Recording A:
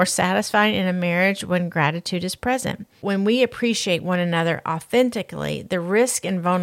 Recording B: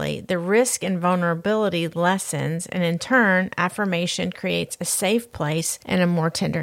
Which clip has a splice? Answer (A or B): A